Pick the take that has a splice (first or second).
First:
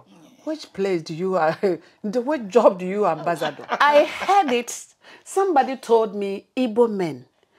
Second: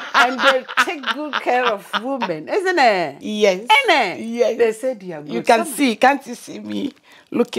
first